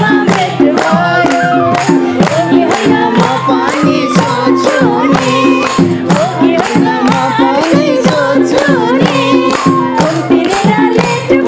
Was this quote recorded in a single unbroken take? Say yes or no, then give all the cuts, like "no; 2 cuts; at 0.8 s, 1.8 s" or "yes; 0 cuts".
yes; 0 cuts